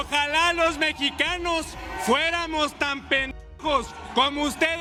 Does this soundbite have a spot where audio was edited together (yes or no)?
no